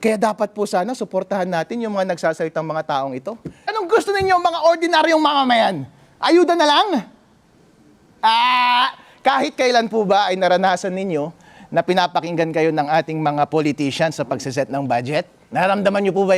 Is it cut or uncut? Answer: cut